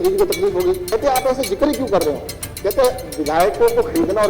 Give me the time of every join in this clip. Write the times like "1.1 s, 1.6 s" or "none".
0.9 s